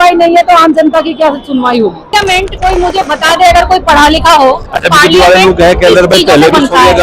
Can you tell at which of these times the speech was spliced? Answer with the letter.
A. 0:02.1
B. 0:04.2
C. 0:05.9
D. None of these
A